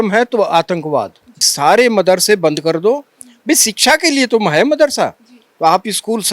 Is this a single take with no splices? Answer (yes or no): no